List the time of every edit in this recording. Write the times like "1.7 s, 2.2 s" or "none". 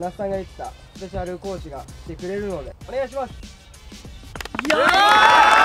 2.8 s